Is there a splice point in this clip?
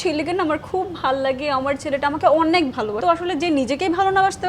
yes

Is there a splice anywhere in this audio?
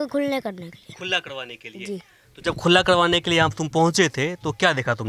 no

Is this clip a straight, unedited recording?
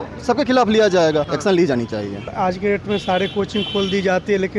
no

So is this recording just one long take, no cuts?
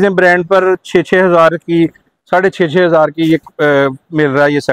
yes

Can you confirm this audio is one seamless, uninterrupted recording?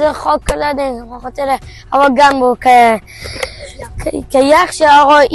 yes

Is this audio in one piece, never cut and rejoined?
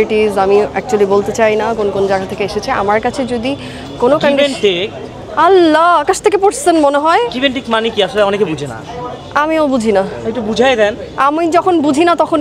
yes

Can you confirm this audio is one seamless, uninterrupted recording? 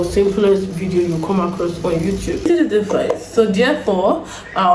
no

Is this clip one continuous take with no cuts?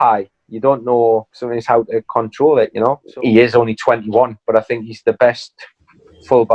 no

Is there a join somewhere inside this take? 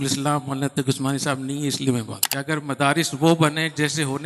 yes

